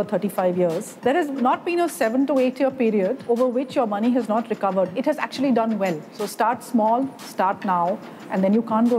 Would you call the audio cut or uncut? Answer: cut